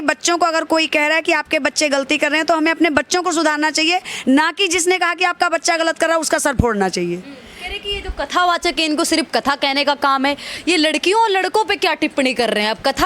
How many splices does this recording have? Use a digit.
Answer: 0